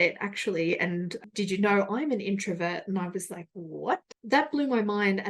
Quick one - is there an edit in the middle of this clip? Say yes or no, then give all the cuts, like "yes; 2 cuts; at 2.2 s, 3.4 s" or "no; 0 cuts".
yes; 2 cuts; at 1.2 s, 4.1 s